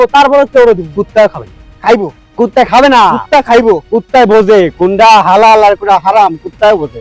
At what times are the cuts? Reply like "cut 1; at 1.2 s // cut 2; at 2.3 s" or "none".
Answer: none